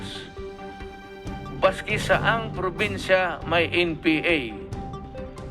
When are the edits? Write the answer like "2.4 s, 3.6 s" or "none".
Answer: 4.6 s